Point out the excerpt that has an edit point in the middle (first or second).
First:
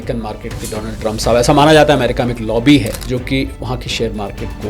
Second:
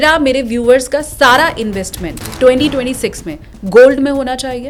first